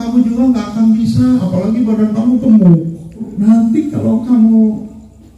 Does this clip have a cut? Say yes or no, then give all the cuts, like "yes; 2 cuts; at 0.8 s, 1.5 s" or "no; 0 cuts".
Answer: yes; 1 cut; at 3.3 s